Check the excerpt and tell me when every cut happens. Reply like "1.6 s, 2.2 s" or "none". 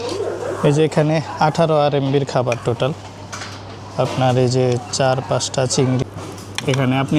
6.0 s